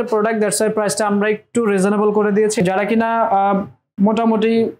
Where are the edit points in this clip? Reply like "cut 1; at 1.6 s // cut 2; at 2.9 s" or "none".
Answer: cut 1; at 2.6 s